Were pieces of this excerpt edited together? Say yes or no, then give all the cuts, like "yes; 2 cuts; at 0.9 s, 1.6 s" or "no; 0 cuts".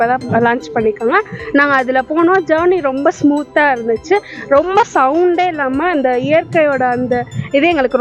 no; 0 cuts